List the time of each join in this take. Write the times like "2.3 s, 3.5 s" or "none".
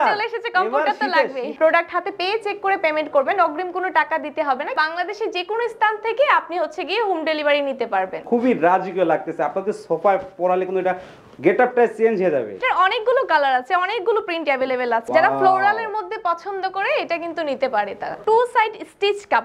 1.5 s, 4.7 s, 8.2 s, 12.5 s, 15.0 s, 18.2 s

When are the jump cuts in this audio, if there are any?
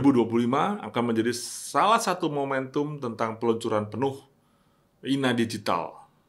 none

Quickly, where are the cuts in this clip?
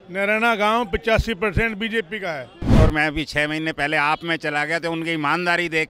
2.8 s

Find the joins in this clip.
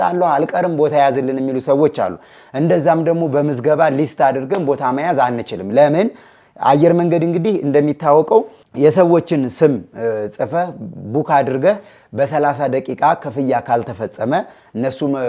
none

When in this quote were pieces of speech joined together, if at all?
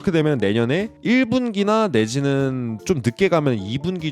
0.9 s

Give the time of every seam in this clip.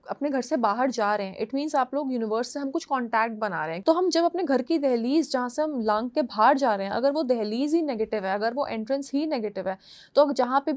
3.7 s

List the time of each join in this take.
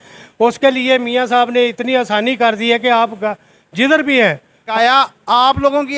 4.6 s

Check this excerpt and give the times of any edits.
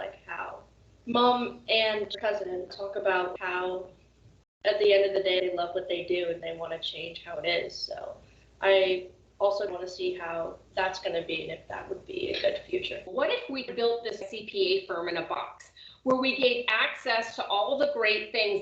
2.1 s, 13.1 s, 14.3 s

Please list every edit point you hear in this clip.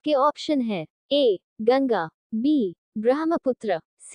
1.4 s

